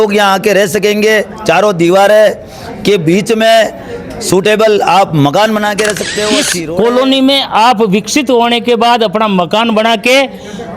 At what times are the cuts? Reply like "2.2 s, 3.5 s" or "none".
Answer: 6.5 s